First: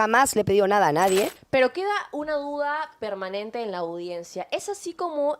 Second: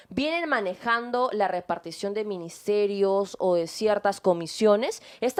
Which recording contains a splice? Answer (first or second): first